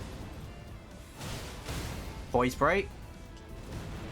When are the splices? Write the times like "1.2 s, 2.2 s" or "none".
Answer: 2.9 s